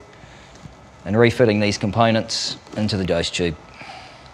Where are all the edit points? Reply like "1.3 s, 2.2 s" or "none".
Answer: 3.0 s